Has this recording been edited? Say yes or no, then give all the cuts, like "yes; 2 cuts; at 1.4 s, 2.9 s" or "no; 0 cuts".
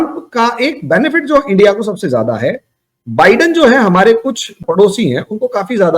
yes; 1 cut; at 4.6 s